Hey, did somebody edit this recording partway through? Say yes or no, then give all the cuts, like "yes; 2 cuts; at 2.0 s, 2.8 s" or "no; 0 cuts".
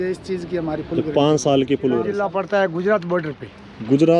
yes; 1 cut; at 2.2 s